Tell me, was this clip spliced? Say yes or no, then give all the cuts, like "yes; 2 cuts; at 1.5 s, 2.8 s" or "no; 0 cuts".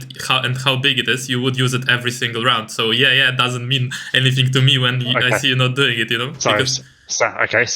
no; 0 cuts